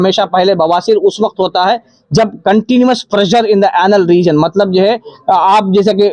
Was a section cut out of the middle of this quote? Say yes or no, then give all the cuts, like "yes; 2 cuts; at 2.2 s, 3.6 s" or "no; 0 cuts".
no; 0 cuts